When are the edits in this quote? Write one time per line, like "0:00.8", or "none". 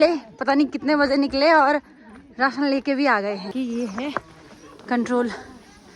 0:03.5